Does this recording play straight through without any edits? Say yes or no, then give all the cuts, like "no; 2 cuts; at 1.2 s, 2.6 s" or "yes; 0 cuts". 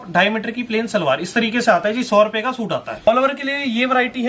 no; 1 cut; at 3.1 s